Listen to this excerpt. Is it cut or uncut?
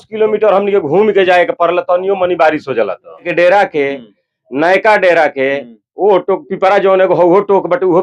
cut